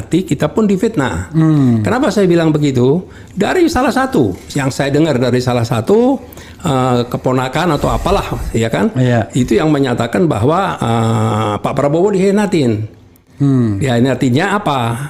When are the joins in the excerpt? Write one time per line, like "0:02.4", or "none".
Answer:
none